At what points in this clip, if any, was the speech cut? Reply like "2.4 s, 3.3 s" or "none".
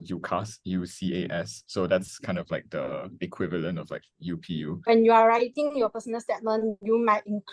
4.9 s